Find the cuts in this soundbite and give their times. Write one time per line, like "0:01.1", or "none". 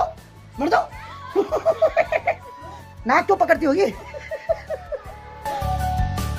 none